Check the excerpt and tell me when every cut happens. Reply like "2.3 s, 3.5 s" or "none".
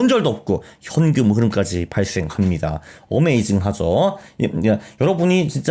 none